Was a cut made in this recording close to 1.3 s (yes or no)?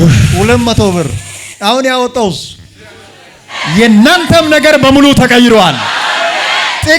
no